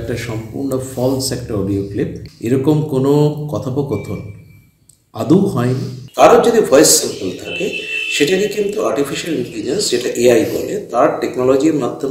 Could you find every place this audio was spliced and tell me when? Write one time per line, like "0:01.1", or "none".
none